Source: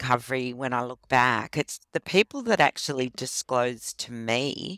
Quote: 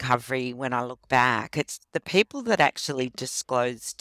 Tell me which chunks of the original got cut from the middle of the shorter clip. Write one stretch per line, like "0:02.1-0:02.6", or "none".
none